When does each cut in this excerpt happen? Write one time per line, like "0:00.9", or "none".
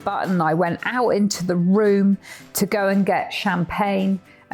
none